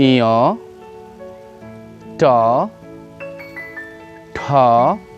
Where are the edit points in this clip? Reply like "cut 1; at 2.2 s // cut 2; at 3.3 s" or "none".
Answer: cut 1; at 2.7 s // cut 2; at 4.2 s